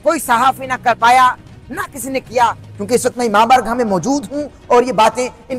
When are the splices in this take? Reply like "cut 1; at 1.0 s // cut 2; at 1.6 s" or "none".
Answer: cut 1; at 2.7 s